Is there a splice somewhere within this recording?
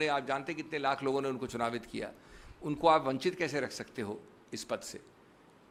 no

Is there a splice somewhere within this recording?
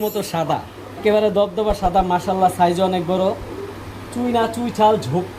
yes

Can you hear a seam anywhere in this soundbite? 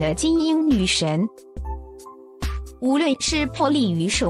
yes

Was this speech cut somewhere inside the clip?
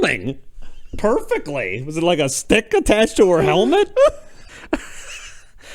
yes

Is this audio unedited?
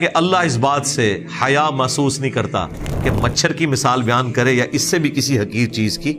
yes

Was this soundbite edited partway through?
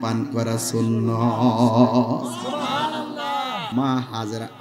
yes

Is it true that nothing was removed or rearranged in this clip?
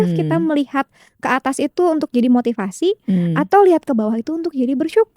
yes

